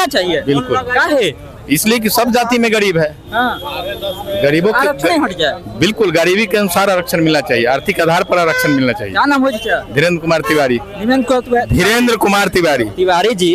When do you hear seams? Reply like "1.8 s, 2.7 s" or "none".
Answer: none